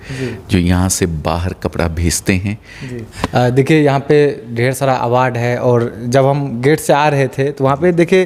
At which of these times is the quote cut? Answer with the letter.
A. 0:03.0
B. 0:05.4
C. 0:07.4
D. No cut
A